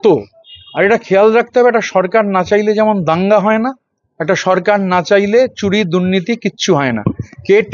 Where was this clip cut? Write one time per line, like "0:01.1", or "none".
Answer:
none